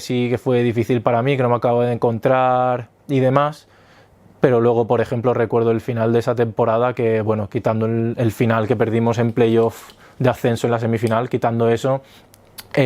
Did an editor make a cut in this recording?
no; 0 cuts

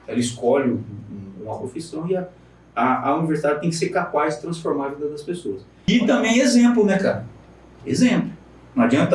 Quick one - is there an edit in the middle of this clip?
yes; 1 cut; at 5.9 s

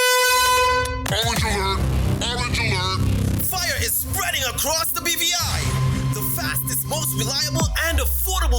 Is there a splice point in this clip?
yes; 1 cut; at 0.9 s

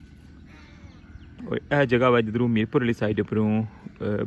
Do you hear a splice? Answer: no; 0 cuts

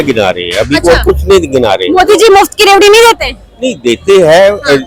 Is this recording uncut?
yes; 0 cuts

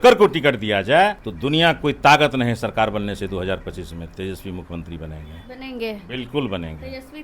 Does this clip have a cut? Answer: yes; 1 cut; at 1.3 s

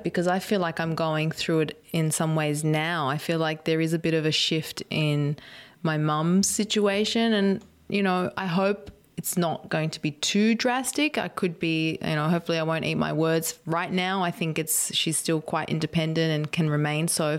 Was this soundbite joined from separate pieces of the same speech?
no; 0 cuts

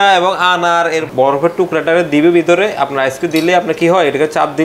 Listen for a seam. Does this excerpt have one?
yes; 1 cut; at 1.1 s

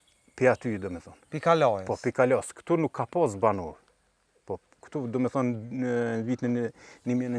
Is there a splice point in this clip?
no; 0 cuts

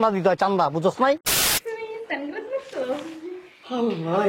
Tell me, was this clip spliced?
yes; 1 cut; at 1.3 s

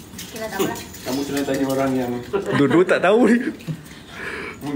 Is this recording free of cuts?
yes; 0 cuts

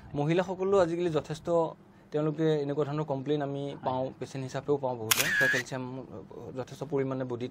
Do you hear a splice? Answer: yes; 1 cut; at 5.4 s

